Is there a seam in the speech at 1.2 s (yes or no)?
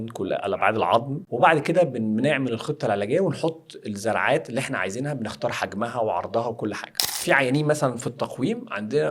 yes